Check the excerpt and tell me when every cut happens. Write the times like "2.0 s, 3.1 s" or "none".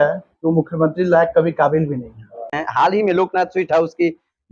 2.6 s